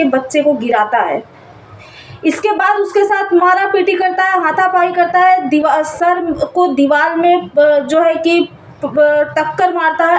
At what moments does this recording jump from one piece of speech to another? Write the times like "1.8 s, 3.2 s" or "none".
none